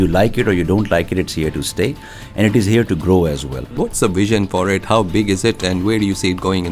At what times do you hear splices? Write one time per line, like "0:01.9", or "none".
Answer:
0:03.7